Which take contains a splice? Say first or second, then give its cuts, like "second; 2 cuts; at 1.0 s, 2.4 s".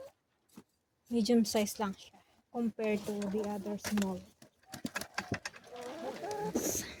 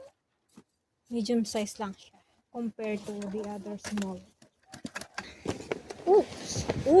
second; 1 cut; at 5.2 s